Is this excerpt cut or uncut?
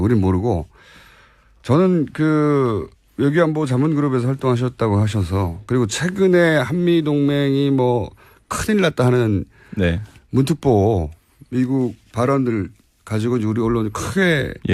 uncut